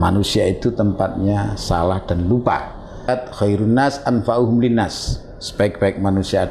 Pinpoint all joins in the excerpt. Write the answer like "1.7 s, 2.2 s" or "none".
3.1 s

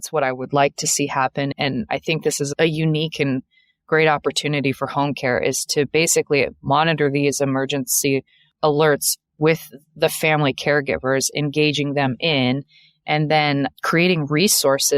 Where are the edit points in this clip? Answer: 8.4 s

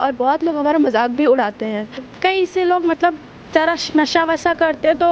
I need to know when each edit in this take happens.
2.0 s

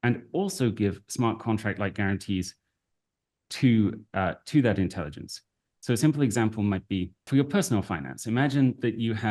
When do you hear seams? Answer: 7.2 s

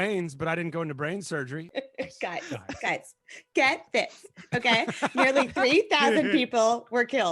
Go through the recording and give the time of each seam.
1.7 s

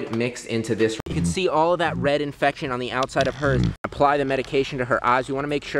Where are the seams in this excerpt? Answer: 1.0 s, 3.9 s

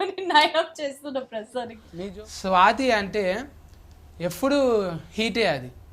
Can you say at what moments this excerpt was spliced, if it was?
1.8 s

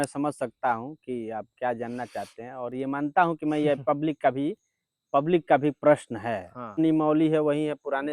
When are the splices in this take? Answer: 6.8 s

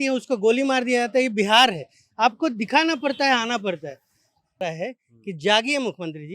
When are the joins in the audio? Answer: 4.6 s

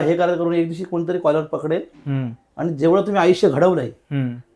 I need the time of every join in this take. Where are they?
none

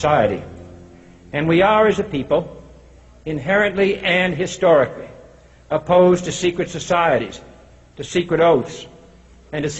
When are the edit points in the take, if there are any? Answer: 7.7 s

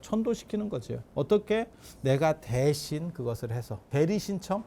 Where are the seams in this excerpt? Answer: 1.0 s, 3.8 s

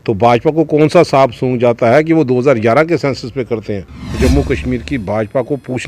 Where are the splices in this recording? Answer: 4.2 s

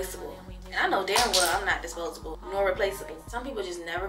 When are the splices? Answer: 2.3 s, 3.1 s

